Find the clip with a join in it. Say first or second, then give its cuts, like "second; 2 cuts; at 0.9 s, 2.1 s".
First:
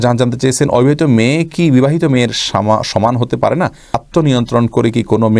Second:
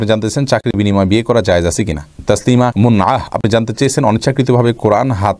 second; 1 cut; at 2.1 s